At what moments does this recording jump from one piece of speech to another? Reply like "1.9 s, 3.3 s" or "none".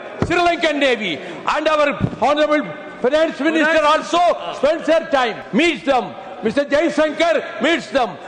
5.4 s